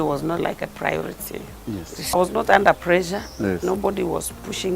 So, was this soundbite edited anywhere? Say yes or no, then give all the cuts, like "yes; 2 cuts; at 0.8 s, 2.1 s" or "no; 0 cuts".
yes; 1 cut; at 2.1 s